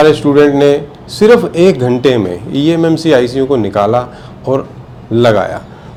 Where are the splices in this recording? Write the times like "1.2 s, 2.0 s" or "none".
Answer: none